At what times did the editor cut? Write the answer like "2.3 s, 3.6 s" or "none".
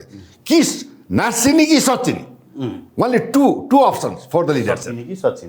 none